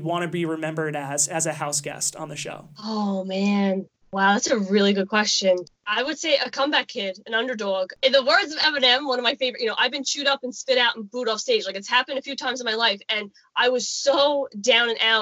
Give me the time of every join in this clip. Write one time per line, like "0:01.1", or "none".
0:04.0
0:07.9